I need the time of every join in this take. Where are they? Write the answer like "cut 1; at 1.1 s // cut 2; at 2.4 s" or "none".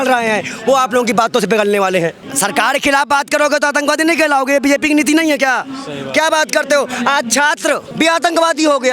cut 1; at 2.3 s